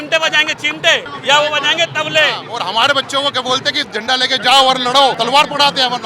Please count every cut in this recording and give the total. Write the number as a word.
three